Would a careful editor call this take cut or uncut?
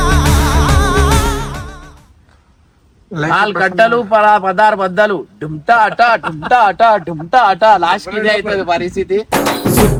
uncut